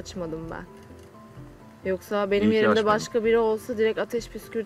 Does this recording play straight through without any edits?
yes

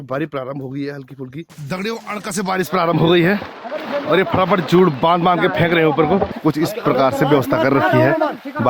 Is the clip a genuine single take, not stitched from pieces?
no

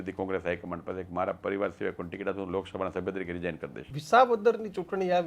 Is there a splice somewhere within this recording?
yes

